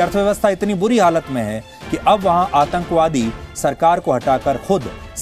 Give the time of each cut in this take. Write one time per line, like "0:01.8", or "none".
none